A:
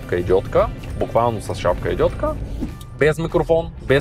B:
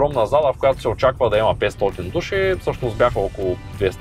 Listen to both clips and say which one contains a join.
A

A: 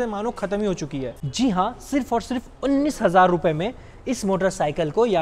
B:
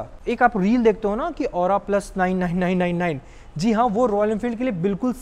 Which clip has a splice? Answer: A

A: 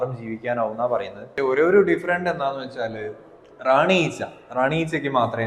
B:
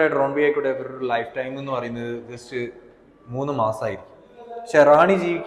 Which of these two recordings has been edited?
A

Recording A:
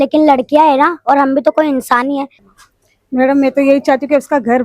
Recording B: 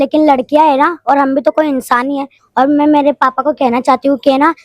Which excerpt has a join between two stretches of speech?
A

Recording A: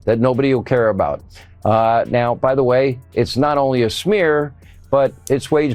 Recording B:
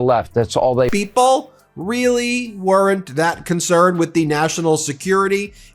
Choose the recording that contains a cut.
B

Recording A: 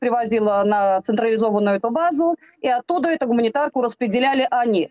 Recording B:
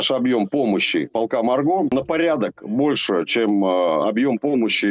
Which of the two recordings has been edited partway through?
B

